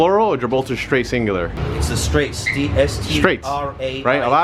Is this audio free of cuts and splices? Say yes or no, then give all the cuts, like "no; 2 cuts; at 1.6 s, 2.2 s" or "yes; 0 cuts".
no; 1 cut; at 1.6 s